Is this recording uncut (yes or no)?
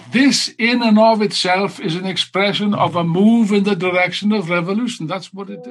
yes